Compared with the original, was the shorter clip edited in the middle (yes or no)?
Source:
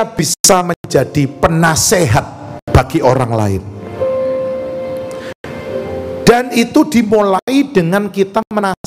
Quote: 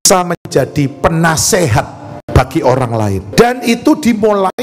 yes